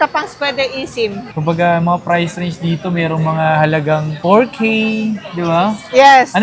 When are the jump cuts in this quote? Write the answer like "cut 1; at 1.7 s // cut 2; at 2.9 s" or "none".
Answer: cut 1; at 1.3 s